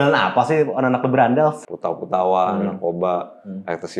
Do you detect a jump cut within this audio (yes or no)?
yes